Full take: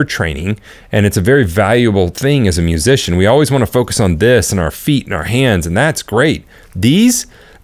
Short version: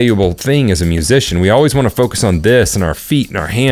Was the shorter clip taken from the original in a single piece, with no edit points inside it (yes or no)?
yes